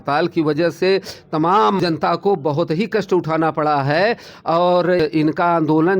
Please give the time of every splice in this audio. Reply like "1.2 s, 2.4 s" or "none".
1.8 s, 5.0 s